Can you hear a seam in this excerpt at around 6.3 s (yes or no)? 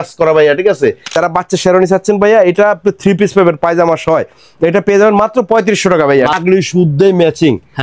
yes